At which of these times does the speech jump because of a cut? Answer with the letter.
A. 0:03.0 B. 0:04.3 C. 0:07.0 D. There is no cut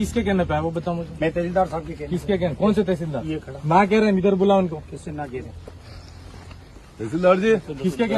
D